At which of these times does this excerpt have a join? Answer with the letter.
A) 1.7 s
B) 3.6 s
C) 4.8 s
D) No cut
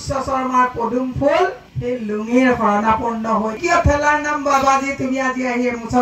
B